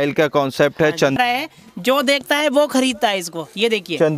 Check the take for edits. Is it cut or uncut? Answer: cut